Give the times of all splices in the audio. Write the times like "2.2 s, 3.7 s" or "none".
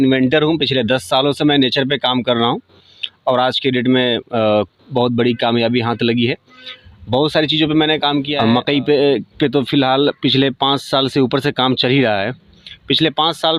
8.3 s